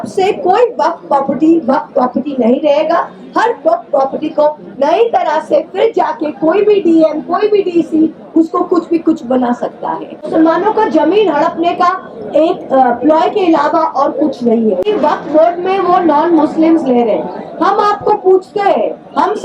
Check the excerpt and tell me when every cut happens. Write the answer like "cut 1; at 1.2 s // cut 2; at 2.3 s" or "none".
cut 1; at 10.3 s // cut 2; at 14.8 s